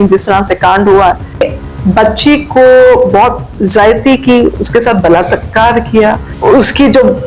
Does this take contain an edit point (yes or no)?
yes